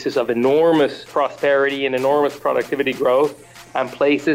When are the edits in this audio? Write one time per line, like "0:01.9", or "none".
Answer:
none